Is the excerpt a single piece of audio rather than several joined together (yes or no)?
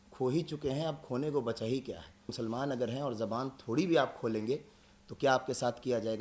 no